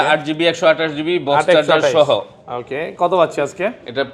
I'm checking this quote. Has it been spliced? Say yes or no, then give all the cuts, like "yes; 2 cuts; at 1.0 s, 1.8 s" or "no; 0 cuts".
no; 0 cuts